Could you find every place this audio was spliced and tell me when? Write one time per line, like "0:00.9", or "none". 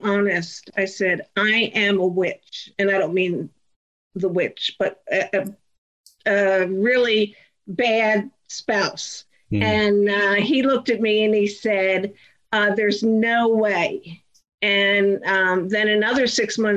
none